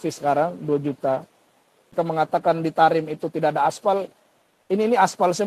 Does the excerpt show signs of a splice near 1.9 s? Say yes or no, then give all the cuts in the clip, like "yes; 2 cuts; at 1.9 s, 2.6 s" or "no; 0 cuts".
yes; 1 cut; at 1.9 s